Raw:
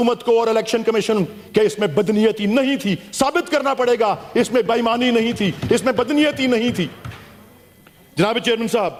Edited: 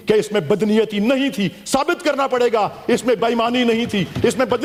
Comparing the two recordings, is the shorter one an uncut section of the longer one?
yes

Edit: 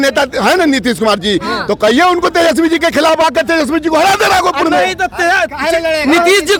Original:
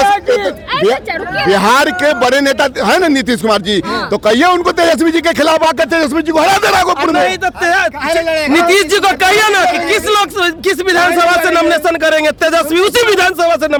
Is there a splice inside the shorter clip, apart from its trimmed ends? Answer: no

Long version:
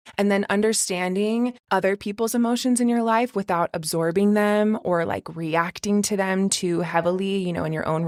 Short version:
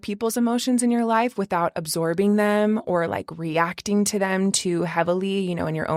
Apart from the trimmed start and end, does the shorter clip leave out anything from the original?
no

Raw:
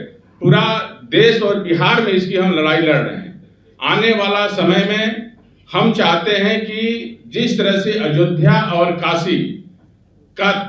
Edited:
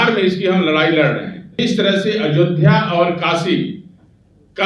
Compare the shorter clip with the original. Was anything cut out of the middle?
yes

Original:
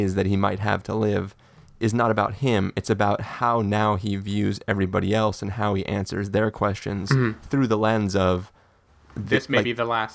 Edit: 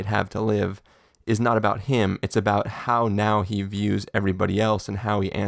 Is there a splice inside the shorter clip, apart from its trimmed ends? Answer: no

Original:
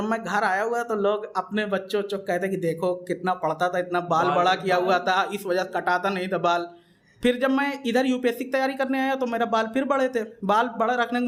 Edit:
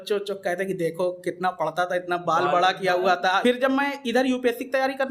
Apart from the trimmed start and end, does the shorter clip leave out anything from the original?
yes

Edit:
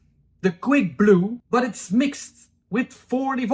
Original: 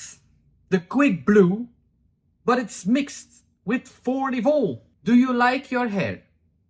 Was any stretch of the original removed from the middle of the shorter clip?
yes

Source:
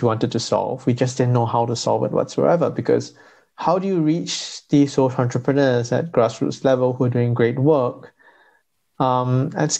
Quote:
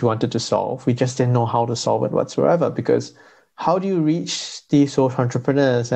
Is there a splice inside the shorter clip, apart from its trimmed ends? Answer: no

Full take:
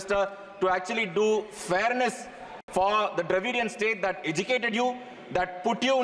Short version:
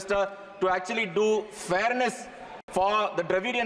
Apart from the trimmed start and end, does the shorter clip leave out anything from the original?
no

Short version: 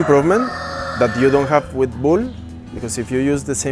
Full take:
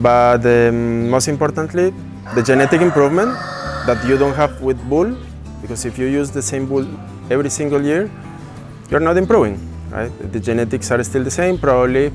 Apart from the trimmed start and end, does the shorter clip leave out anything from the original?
no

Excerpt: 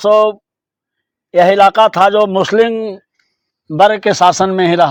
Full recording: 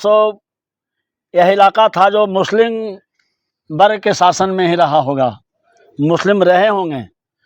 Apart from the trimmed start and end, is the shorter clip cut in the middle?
no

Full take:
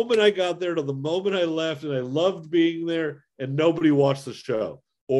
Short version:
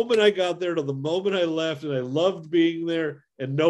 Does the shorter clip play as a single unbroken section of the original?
yes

